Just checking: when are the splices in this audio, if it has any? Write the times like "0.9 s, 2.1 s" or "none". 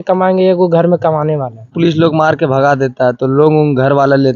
1.7 s